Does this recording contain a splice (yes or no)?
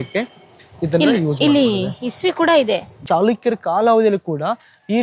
yes